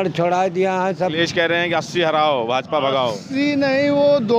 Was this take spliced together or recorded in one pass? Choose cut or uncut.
cut